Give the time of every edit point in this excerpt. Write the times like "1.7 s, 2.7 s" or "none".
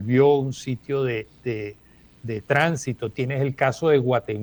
none